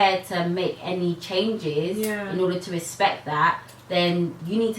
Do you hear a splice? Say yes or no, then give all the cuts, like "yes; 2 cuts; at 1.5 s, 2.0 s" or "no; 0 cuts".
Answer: no; 0 cuts